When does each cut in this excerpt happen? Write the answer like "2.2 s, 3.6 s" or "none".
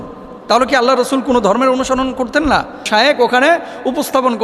2.9 s